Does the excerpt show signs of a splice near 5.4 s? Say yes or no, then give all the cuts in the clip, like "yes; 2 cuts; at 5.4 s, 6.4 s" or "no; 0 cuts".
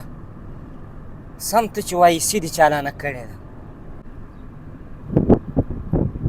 no; 1 cut; at 4.0 s